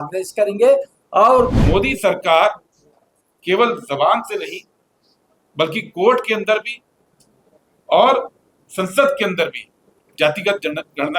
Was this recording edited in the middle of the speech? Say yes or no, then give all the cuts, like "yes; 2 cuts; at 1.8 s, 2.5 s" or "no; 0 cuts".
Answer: yes; 1 cut; at 1.6 s